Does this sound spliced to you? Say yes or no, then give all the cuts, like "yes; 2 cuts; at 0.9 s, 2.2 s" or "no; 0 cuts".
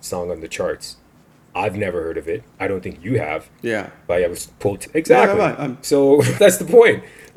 no; 0 cuts